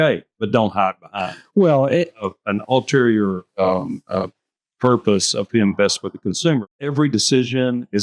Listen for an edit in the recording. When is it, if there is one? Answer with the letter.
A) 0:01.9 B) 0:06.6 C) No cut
B